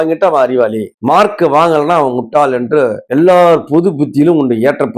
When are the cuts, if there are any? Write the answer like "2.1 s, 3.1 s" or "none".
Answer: none

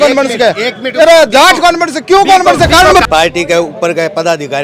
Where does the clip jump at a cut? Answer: 3.0 s

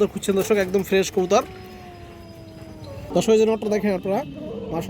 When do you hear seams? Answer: none

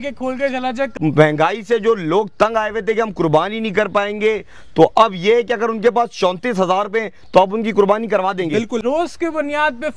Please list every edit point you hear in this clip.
0.9 s, 8.8 s

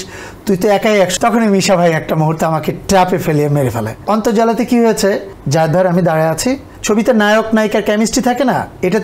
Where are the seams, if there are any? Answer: 1.1 s, 3.9 s, 5.3 s, 6.7 s

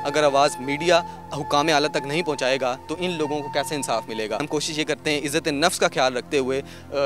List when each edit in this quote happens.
4.4 s

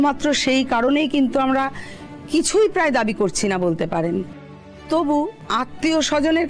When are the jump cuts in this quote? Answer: 5.4 s

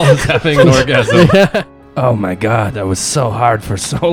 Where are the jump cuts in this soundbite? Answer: 1.7 s

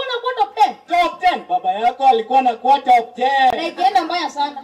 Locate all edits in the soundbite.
none

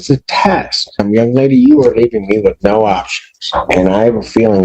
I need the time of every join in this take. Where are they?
1.0 s

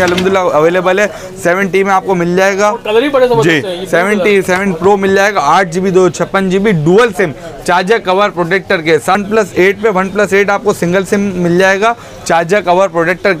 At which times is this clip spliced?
9.2 s

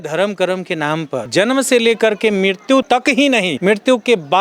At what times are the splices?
1.2 s, 3.1 s

